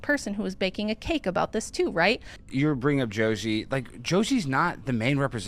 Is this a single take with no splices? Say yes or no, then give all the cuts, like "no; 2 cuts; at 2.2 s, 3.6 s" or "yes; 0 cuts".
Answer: no; 1 cut; at 2.4 s